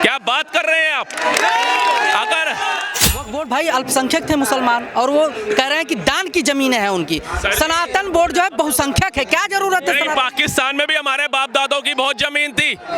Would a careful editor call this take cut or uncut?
cut